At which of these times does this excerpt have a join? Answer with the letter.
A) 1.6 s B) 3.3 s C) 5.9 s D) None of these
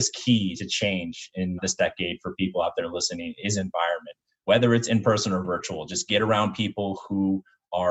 A